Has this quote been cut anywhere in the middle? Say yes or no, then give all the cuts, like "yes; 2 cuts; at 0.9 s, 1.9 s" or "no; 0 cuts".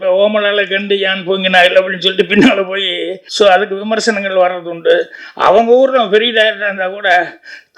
yes; 2 cuts; at 3.2 s, 5.2 s